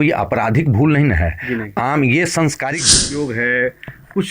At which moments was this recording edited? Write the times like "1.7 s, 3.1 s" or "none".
3.0 s